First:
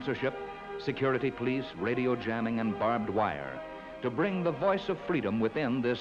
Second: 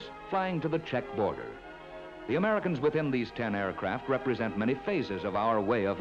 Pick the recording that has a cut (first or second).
second